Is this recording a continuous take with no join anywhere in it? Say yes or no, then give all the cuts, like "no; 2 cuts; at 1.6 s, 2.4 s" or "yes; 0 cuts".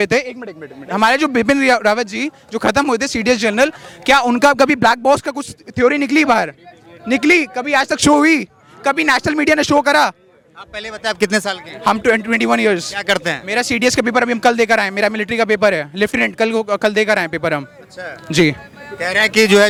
yes; 0 cuts